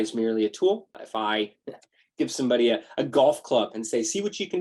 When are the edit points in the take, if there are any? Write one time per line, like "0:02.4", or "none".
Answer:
0:01.0